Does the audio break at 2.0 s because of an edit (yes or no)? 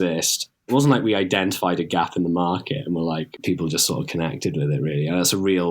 no